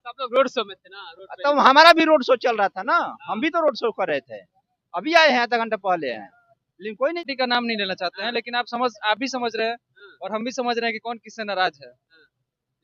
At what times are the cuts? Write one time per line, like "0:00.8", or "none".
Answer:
0:07.3